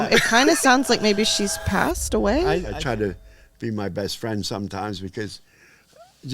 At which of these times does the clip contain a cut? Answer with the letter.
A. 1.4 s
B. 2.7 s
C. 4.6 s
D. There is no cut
B